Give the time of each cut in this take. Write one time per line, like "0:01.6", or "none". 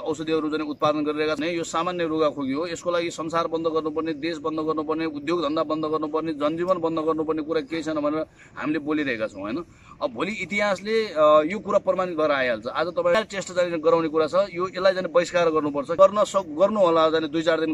0:01.4
0:13.1
0:15.9